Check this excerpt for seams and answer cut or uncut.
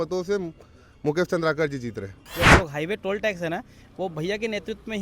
cut